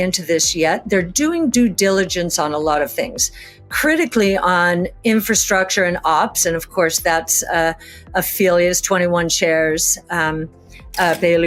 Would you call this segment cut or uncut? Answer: uncut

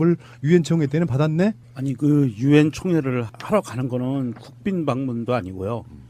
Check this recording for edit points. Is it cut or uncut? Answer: cut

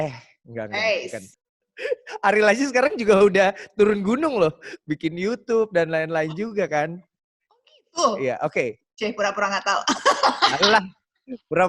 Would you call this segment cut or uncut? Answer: cut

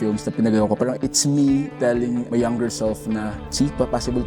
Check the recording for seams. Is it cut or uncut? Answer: cut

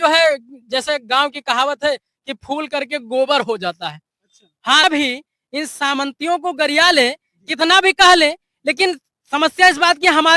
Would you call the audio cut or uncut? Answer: cut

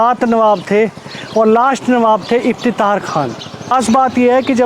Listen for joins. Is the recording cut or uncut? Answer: cut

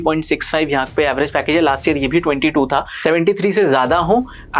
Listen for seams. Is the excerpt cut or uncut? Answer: cut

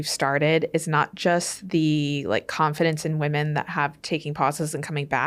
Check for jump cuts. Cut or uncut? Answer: uncut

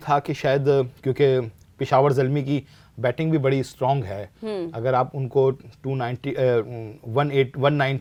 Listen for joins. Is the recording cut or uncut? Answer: uncut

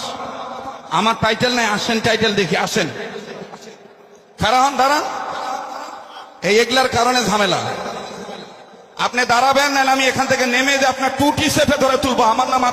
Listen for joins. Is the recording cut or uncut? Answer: uncut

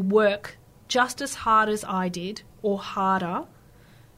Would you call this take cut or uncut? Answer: uncut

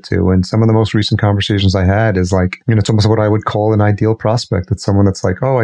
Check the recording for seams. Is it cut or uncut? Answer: cut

